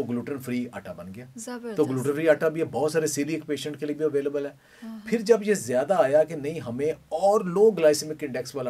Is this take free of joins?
yes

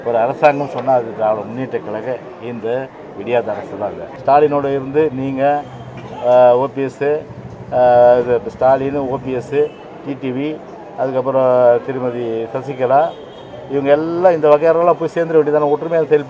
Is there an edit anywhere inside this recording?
yes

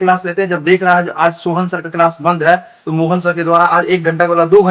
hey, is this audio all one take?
yes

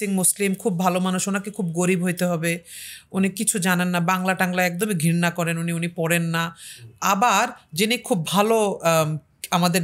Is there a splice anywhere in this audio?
no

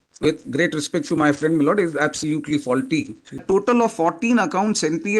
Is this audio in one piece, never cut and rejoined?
no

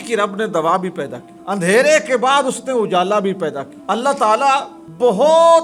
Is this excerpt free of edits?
yes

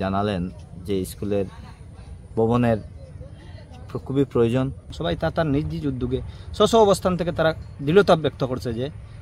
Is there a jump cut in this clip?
yes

